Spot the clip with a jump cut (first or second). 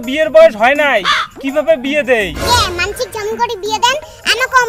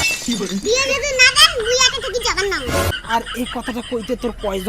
second